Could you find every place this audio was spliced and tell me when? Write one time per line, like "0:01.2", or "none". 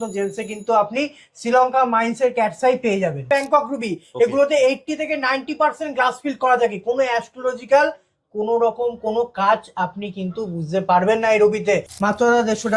0:03.3
0:11.9

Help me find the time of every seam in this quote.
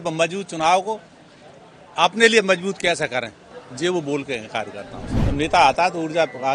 0:05.2

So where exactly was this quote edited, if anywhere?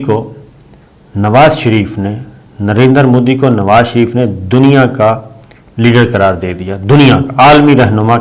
none

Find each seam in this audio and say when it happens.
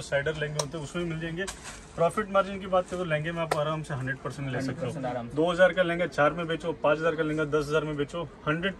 none

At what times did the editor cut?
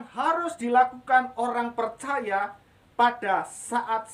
none

